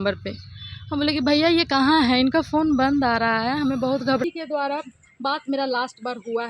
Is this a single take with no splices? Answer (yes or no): no